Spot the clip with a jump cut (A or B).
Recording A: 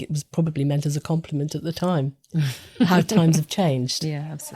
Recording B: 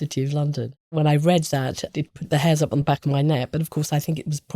B